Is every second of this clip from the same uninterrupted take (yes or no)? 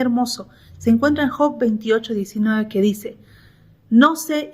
yes